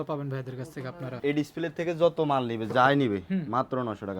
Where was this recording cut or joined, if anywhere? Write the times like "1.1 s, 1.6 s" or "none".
1.2 s